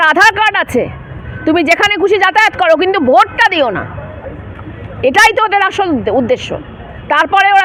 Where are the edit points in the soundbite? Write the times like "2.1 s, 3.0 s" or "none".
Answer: none

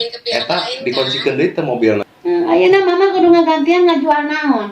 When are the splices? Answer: 2.1 s

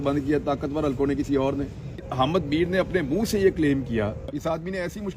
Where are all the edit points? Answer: 2.1 s, 4.2 s

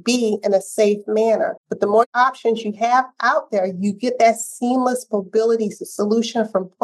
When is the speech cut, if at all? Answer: 2.0 s

